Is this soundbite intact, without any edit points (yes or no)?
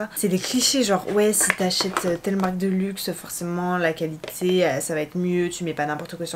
yes